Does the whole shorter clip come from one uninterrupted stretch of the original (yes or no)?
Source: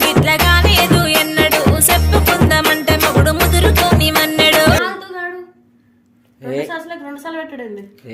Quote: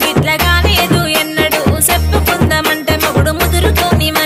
yes